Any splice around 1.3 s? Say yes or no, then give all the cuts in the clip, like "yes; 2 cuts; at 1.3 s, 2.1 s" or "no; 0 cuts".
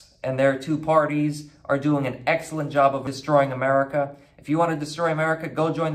no; 1 cut; at 3.1 s